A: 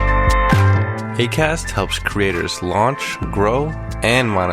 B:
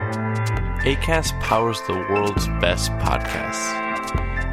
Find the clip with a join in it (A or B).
A